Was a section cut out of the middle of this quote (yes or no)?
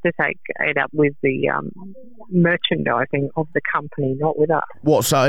no